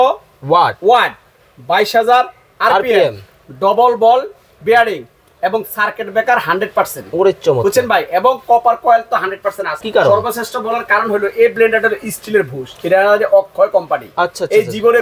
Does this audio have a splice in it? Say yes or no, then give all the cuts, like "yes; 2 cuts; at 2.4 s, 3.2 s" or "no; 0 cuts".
yes; 1 cut; at 9.7 s